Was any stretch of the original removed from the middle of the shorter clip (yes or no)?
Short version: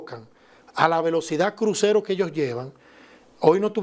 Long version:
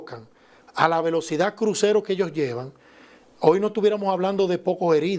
no